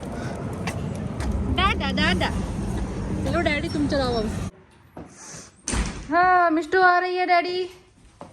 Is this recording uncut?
no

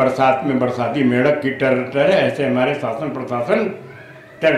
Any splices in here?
no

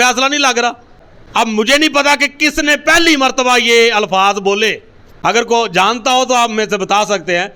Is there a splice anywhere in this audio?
no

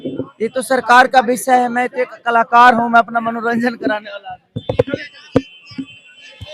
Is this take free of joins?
yes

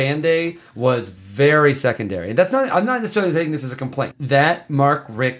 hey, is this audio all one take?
no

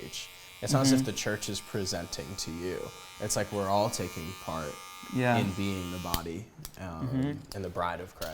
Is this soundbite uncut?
yes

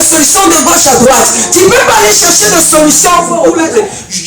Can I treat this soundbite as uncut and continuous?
no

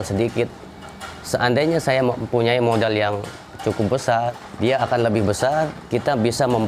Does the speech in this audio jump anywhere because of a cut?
yes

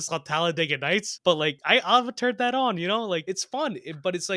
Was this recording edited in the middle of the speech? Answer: yes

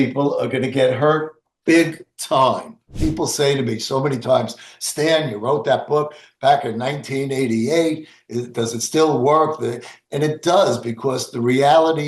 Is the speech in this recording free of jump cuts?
no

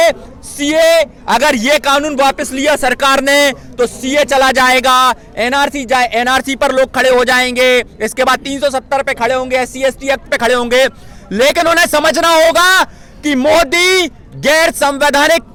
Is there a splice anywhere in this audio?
no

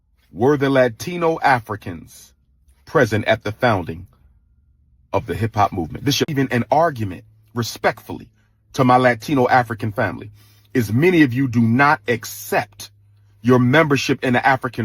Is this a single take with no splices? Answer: no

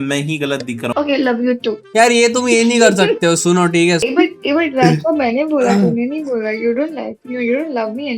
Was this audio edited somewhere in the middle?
yes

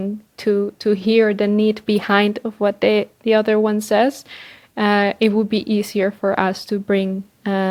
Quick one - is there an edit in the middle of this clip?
no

